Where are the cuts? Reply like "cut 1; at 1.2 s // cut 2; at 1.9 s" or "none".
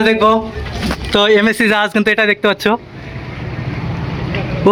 none